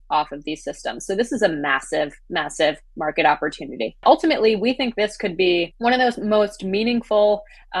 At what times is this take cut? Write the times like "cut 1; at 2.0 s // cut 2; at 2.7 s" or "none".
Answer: cut 1; at 4.0 s // cut 2; at 5.7 s